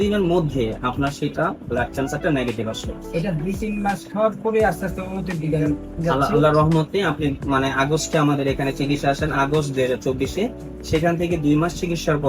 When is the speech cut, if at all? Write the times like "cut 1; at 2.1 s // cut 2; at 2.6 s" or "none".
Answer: none